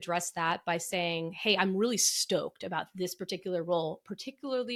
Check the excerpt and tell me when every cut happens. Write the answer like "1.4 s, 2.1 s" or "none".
none

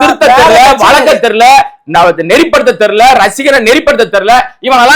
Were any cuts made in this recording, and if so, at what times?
none

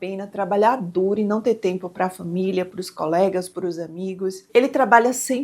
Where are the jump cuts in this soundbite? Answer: 4.3 s

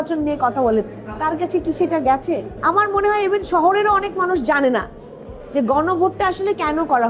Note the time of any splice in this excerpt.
2.5 s

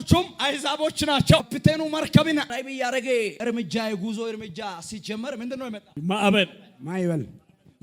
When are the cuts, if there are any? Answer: 1.5 s, 2.5 s, 3.4 s, 5.9 s

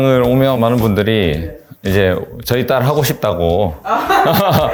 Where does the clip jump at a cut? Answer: none

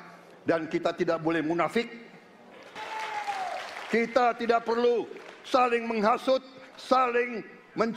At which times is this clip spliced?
2.7 s

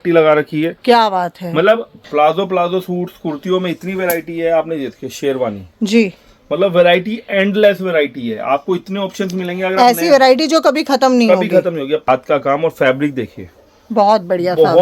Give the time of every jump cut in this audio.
1.9 s, 12.0 s

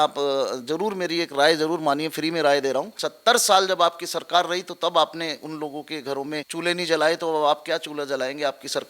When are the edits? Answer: 3.0 s, 6.5 s

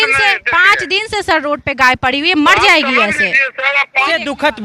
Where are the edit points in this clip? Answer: 3.6 s

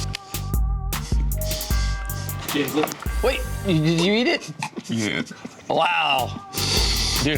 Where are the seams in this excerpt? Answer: none

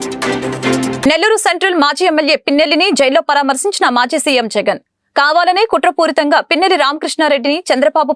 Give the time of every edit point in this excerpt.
1.0 s

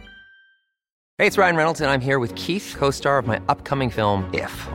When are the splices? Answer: 1.1 s

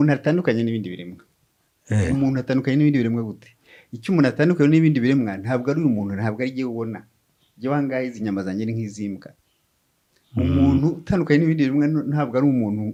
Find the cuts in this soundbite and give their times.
none

